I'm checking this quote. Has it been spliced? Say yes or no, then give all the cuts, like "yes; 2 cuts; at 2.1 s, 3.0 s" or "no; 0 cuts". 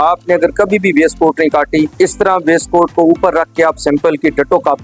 yes; 1 cut; at 1.9 s